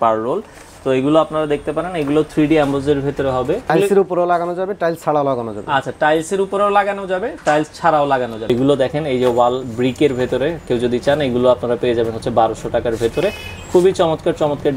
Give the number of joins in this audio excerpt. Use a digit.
2